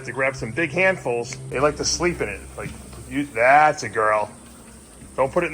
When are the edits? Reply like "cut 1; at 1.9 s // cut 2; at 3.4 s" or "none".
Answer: cut 1; at 1.4 s